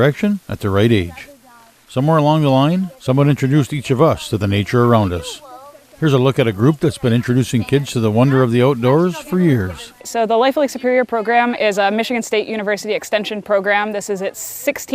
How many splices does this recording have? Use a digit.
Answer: 1